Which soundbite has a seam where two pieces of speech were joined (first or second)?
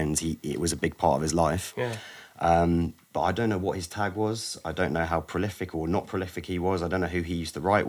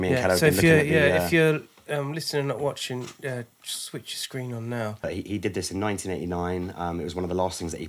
second